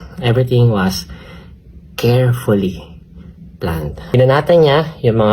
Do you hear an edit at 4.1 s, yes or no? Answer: yes